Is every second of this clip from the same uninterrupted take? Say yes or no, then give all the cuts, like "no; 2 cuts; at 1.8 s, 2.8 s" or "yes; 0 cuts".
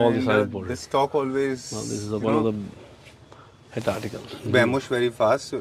yes; 0 cuts